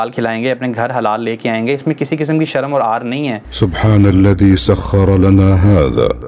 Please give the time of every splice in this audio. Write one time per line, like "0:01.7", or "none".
0:03.5

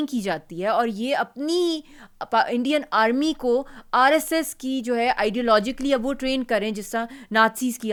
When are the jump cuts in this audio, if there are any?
none

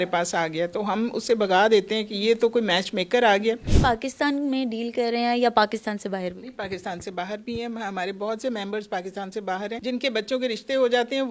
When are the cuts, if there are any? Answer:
0:03.7
0:09.8

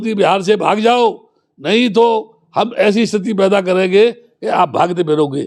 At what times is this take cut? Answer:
none

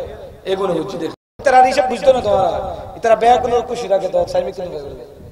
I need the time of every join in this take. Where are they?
0:01.4

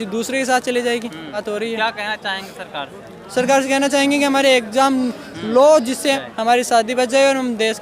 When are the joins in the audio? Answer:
0:01.4
0:06.2

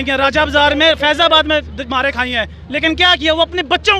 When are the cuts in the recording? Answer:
none

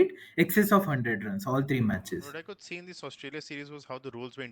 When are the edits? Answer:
0:01.9

